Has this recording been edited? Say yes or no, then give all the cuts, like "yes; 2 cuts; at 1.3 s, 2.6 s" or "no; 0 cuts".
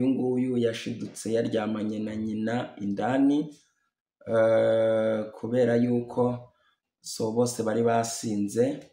no; 0 cuts